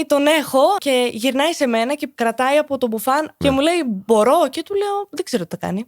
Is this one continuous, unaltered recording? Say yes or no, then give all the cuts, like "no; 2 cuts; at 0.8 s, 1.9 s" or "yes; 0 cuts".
no; 3 cuts; at 0.8 s, 2.1 s, 3.3 s